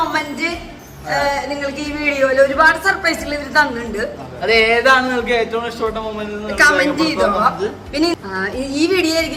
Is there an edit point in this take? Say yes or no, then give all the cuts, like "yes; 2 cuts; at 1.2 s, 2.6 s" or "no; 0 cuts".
yes; 1 cut; at 8.1 s